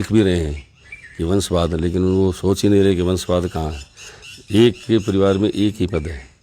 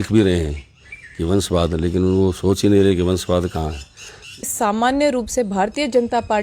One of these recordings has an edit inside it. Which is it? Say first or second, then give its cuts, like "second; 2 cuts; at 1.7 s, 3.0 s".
second; 1 cut; at 4.4 s